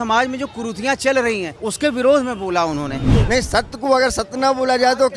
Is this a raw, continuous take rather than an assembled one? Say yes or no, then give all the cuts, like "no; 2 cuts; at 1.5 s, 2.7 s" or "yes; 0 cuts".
no; 2 cuts; at 1.6 s, 3.1 s